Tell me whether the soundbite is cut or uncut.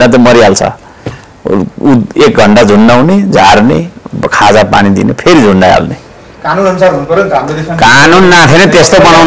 uncut